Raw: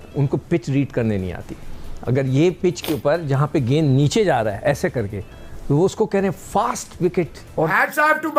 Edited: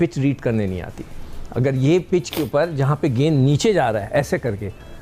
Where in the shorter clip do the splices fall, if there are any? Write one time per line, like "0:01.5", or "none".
none